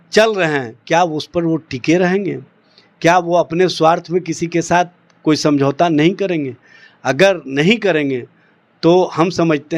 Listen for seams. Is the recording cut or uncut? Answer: uncut